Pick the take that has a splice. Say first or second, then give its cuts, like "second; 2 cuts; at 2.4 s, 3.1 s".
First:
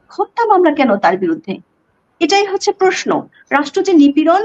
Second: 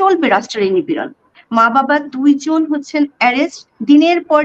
second; 1 cut; at 1.3 s